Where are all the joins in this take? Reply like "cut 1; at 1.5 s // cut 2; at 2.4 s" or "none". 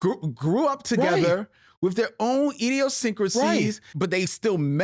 cut 1; at 3.9 s